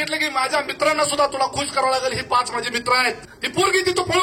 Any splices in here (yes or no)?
yes